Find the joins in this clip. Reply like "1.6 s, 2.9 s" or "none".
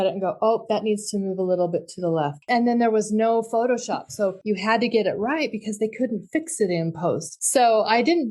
2.4 s, 4.4 s, 7.3 s